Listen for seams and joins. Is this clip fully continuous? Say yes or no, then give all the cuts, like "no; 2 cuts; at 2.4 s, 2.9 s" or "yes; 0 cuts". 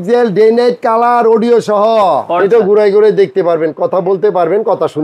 no; 1 cut; at 2.3 s